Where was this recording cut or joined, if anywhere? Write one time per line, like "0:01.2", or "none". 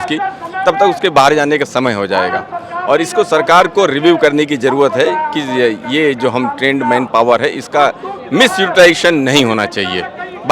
none